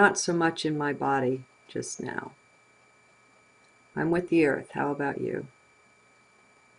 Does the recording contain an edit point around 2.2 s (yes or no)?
yes